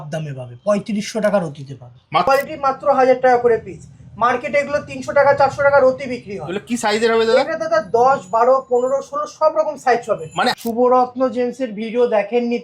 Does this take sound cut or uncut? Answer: cut